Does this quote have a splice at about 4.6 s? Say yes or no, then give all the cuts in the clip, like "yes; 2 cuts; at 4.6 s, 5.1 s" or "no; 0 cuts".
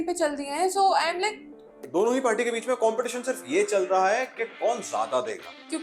no; 1 cut; at 1.8 s